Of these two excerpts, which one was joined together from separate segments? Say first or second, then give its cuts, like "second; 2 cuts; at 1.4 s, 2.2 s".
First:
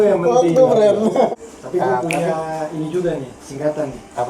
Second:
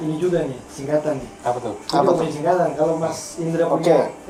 first; 1 cut; at 1.3 s